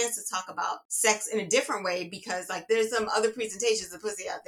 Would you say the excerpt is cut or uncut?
cut